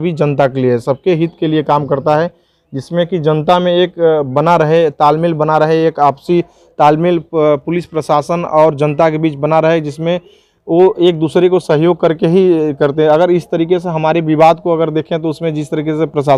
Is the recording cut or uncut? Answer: uncut